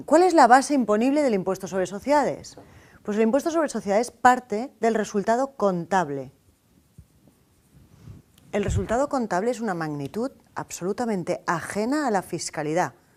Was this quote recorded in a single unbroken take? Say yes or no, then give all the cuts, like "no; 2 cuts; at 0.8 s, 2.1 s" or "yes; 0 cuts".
yes; 0 cuts